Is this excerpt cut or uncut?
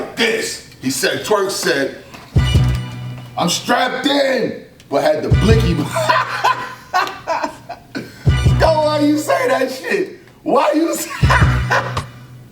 cut